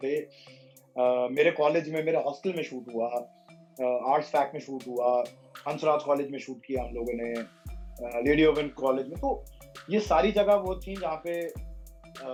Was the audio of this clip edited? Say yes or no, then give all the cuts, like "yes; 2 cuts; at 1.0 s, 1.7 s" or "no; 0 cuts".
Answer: no; 0 cuts